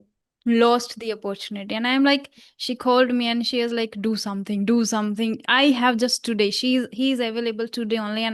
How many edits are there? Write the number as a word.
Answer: zero